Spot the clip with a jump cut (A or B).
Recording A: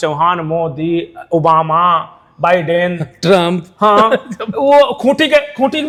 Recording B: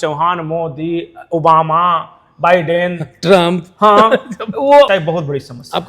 B